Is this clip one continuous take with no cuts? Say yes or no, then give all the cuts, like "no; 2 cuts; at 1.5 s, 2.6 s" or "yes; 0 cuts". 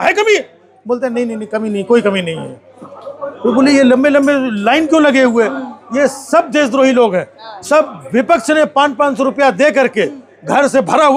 yes; 0 cuts